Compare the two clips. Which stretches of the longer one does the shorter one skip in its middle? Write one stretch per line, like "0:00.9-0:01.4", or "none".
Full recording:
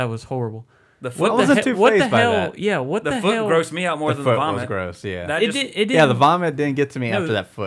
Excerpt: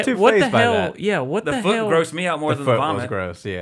none